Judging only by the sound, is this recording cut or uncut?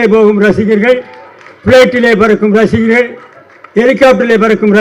uncut